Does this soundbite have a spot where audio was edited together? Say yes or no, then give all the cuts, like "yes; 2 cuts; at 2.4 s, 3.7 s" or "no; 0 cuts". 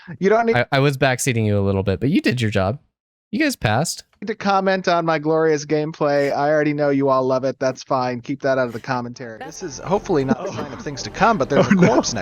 yes; 1 cut; at 9.3 s